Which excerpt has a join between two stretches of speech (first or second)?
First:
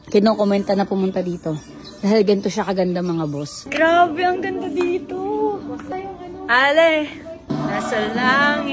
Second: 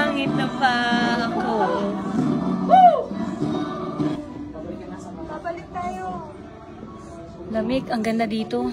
first